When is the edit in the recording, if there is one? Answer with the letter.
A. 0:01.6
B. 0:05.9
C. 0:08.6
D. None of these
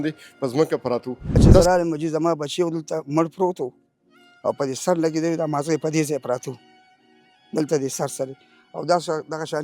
A